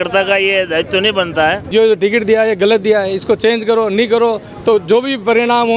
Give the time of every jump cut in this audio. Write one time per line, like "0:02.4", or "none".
0:01.7